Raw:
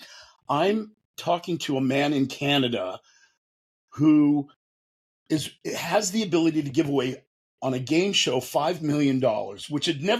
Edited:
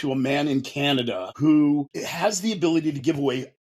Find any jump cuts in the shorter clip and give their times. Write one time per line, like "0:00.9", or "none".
0:01.3
0:02.0